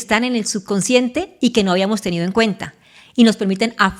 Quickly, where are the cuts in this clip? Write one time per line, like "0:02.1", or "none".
none